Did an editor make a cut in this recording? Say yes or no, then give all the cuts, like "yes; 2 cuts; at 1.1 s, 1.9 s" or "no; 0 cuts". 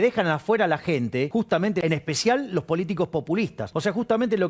yes; 2 cuts; at 1.6 s, 3.6 s